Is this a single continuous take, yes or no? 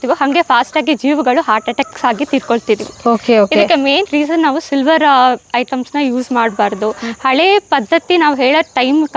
yes